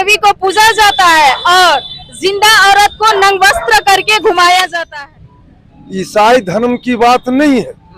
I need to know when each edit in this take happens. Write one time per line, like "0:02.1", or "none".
0:04.8

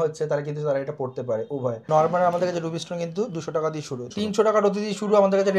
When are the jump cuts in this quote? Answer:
0:01.8
0:04.1

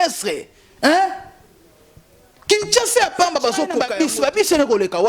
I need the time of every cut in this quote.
0:03.8

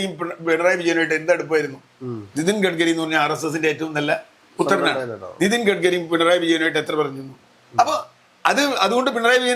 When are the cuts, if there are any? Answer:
none

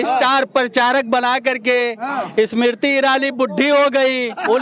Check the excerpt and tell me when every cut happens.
none

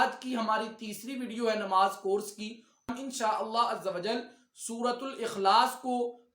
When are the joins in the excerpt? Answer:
0:02.9

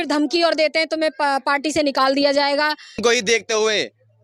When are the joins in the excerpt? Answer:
0:03.0

